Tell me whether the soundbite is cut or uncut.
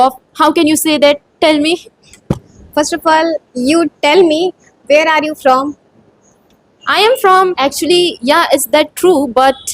cut